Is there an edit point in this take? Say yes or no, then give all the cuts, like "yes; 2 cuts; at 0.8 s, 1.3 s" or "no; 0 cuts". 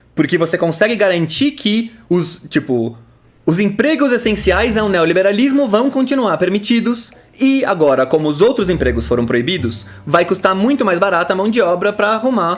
no; 0 cuts